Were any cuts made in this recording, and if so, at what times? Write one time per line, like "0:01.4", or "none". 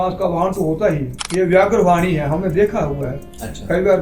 0:01.2